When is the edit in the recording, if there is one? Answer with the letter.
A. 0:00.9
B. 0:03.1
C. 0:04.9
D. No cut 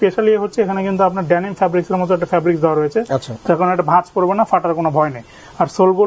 D